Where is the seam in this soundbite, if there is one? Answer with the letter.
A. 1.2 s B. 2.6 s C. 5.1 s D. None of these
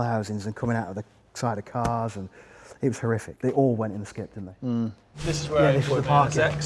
C